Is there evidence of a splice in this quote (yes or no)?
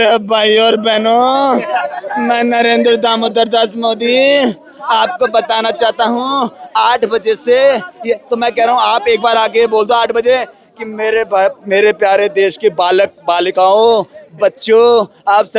no